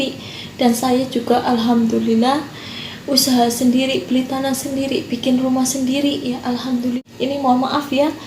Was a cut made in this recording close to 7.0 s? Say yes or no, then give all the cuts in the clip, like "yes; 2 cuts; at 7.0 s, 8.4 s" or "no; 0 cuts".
yes; 1 cut; at 7.0 s